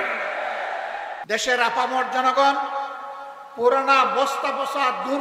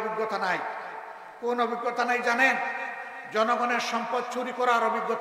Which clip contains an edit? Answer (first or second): first